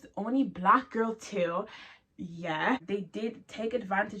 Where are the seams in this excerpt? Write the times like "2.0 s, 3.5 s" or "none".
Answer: 2.8 s